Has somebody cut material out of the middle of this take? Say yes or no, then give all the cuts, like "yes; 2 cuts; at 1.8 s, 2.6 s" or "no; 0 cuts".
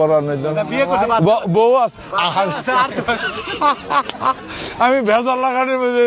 no; 0 cuts